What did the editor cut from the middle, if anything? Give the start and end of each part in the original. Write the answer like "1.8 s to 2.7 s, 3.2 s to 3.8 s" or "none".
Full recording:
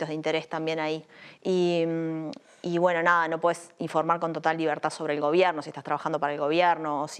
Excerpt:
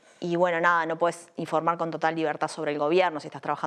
none